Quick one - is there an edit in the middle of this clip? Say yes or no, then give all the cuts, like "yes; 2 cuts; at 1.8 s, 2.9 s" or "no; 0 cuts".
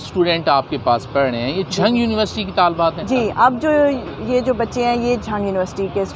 no; 0 cuts